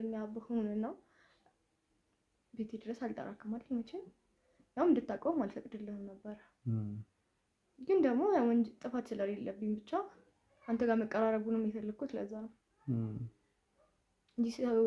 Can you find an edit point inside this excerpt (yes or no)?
no